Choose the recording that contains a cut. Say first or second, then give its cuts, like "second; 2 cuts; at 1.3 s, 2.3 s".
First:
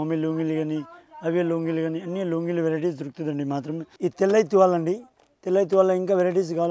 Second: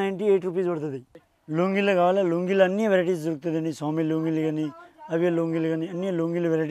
first; 1 cut; at 3.9 s